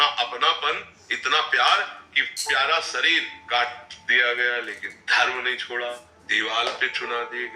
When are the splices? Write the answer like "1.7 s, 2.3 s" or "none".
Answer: 3.3 s, 6.2 s